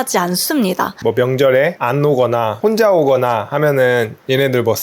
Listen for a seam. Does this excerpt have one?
yes; 3 cuts; at 0.9 s, 1.8 s, 2.5 s

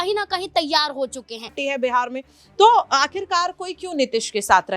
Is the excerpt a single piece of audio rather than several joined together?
no; 1 cut; at 1.6 s

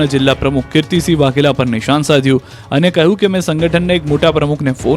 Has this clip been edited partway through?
yes; 1 cut; at 3.0 s

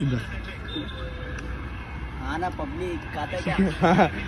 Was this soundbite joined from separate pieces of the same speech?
no; 0 cuts

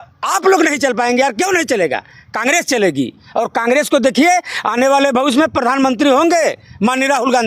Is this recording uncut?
yes; 0 cuts

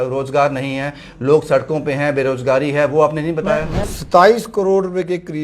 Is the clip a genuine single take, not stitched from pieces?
no; 1 cut; at 3.8 s

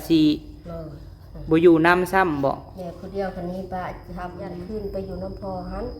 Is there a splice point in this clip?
yes; 1 cut; at 4.4 s

